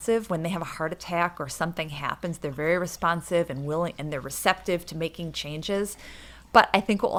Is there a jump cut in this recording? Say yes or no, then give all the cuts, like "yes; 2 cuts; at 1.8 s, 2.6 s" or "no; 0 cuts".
no; 0 cuts